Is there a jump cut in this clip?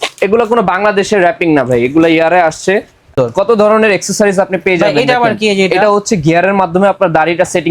yes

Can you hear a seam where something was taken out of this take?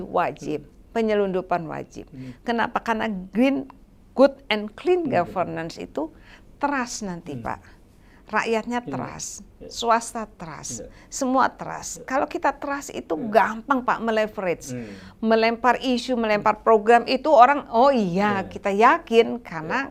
no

